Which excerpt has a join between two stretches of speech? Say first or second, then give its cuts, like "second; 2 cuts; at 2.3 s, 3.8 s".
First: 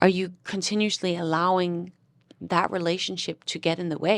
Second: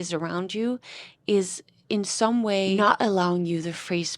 second; 1 cut; at 2.7 s